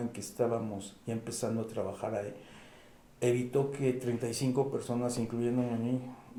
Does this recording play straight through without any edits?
yes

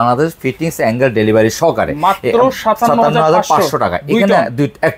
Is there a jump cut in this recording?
no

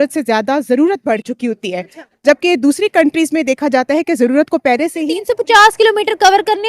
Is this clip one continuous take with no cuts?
no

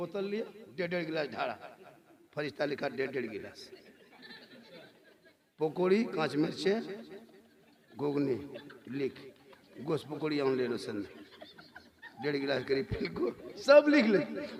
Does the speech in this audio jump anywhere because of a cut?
no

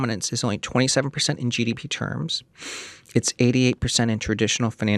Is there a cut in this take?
no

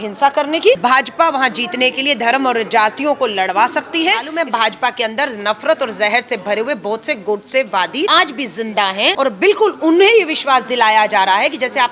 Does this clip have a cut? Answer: yes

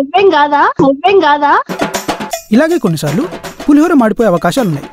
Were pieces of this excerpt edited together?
no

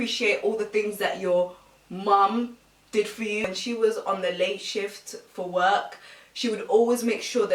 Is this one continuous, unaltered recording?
yes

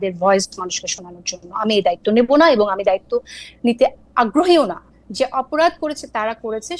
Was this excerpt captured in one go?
yes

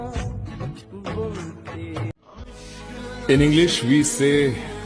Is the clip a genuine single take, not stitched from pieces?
yes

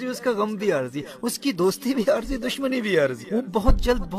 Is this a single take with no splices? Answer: no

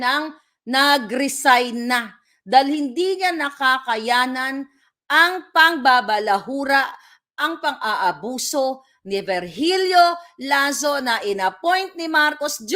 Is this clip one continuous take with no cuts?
yes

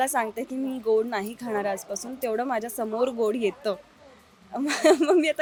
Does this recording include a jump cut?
no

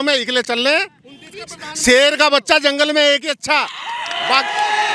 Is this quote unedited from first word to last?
yes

